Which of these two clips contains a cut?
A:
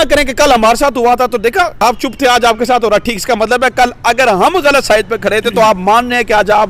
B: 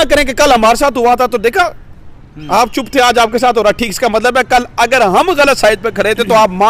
A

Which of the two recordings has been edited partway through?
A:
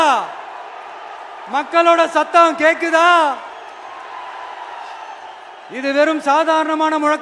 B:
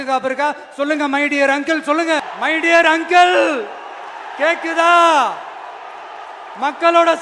B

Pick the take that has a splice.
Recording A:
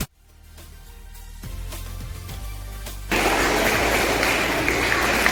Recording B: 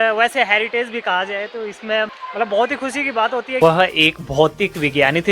B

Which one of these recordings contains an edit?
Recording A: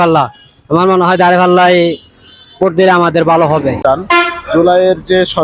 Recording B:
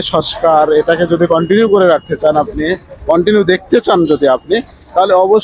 A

